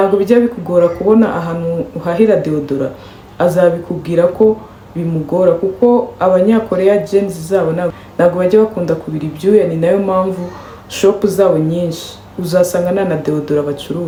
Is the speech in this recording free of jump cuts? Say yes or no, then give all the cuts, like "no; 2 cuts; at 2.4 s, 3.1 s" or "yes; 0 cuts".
yes; 0 cuts